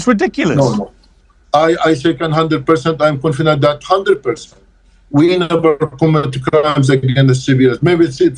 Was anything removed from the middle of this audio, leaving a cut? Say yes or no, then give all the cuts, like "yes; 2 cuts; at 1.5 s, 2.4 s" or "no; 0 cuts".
no; 0 cuts